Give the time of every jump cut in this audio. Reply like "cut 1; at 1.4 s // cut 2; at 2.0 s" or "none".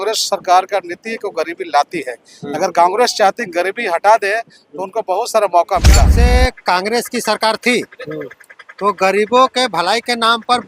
cut 1; at 6.1 s